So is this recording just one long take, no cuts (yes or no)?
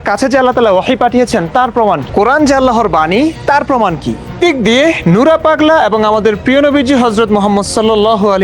no